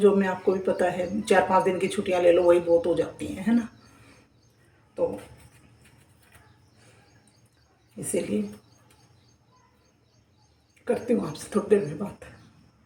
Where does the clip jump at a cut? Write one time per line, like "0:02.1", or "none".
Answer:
none